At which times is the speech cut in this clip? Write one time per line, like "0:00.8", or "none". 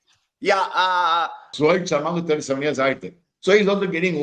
0:01.5